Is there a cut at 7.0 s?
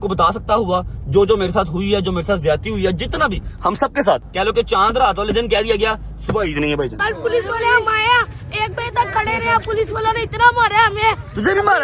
yes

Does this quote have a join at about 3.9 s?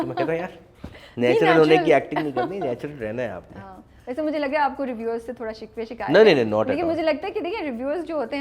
no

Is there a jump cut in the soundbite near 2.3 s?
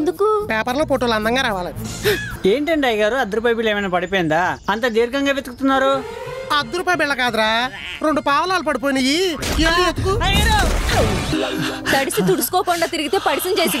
yes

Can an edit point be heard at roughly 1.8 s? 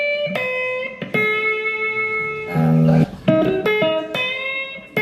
no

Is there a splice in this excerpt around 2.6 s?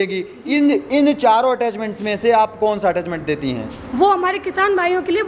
no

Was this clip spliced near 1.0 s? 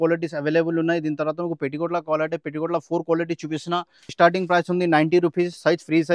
no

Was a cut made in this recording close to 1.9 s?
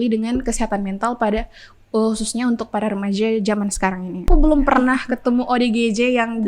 no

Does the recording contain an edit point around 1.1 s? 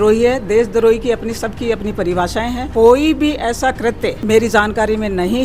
no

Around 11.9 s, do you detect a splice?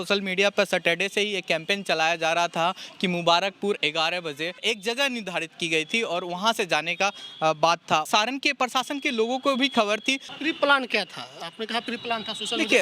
no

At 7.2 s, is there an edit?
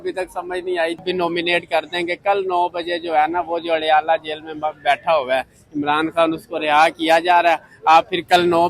no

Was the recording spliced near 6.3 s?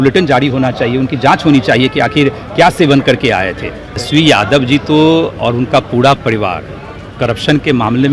no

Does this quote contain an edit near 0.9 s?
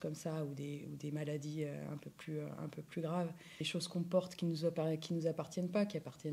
no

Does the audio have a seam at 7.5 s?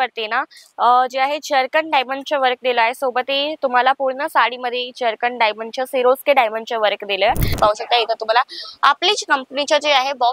yes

